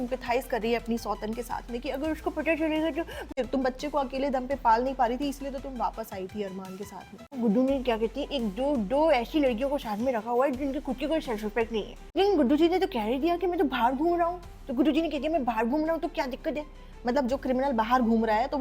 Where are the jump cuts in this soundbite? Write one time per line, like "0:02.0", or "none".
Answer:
0:03.3
0:07.3
0:12.2